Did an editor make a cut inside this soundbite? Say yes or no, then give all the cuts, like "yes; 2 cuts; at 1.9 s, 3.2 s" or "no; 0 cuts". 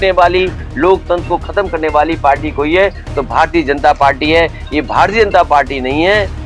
no; 0 cuts